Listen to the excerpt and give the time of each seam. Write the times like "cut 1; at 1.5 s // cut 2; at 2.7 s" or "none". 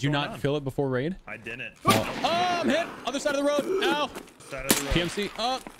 cut 1; at 4.4 s